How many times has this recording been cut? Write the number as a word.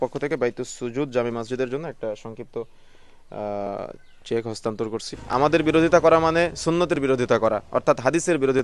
one